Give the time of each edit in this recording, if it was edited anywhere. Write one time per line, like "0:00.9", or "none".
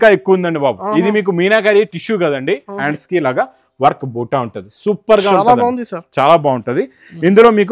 0:02.8